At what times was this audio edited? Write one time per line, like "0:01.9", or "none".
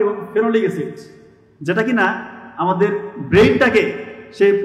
none